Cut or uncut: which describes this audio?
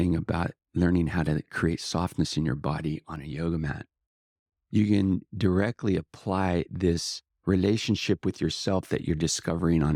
uncut